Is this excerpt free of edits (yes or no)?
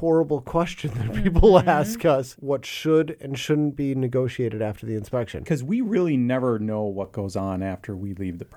no